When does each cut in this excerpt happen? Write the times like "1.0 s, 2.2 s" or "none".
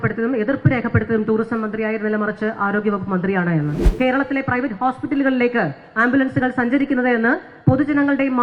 3.8 s